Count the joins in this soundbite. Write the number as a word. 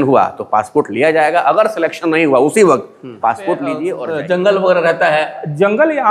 one